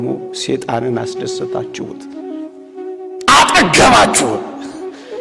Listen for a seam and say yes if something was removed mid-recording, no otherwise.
no